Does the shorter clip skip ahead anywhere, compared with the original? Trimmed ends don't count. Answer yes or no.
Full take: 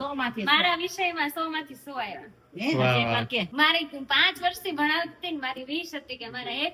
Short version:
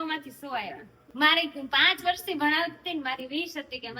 yes